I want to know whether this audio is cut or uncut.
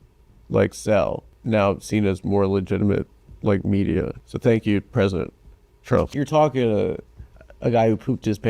cut